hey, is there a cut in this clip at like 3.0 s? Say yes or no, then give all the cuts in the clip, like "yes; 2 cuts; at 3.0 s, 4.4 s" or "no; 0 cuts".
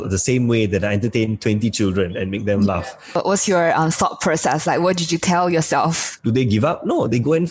yes; 2 cuts; at 3.0 s, 6.1 s